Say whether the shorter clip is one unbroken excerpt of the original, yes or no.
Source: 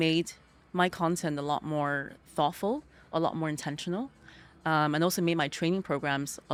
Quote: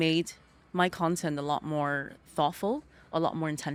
yes